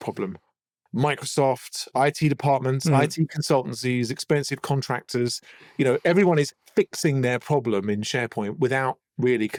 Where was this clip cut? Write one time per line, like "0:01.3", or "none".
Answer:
none